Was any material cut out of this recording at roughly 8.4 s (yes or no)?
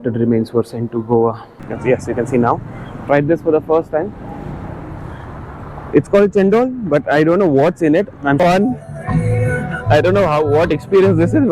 yes